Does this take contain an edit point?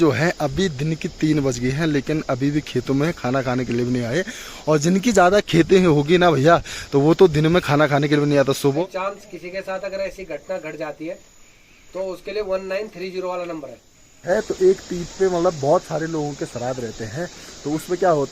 yes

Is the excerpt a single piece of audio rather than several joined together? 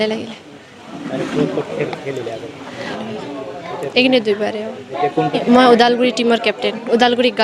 no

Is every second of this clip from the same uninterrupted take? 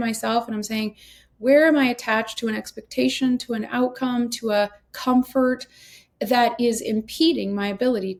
yes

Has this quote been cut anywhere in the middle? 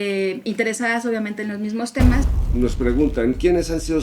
yes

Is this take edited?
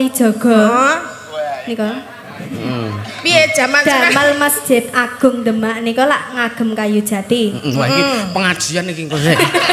no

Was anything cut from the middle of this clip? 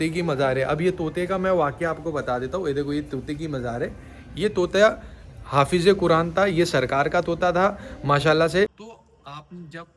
yes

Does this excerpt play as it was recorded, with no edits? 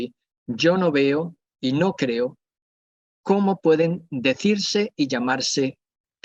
yes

